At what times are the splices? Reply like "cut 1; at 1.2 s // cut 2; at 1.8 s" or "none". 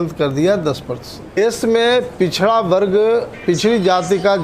cut 1; at 1.4 s